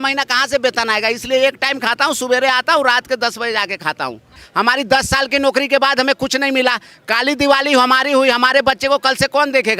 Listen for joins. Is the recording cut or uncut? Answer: cut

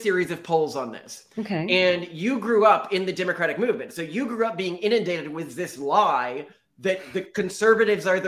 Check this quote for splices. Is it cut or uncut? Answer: uncut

